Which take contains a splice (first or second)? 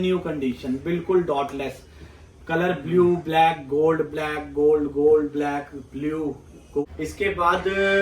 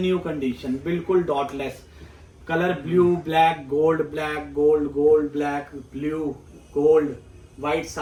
first